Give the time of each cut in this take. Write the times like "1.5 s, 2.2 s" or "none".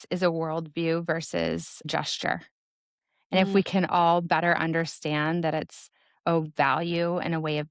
1.9 s